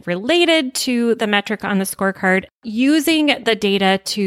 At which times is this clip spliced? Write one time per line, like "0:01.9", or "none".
0:02.4